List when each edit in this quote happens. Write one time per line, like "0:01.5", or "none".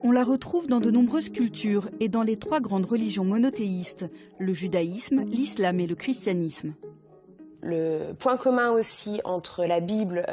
none